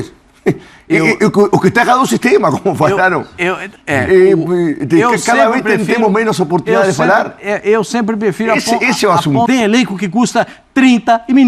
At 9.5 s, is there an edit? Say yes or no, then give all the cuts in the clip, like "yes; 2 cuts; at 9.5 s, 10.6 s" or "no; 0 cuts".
yes; 1 cut; at 9.5 s